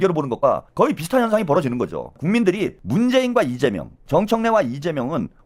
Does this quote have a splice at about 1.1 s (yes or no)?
no